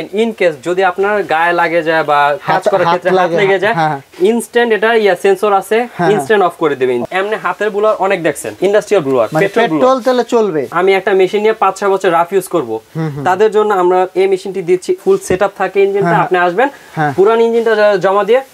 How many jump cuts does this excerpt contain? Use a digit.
3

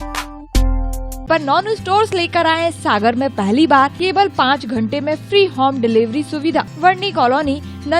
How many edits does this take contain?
3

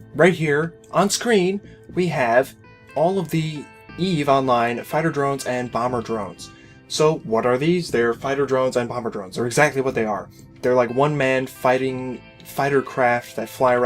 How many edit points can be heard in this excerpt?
1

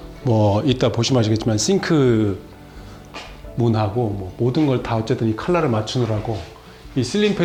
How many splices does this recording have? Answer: 0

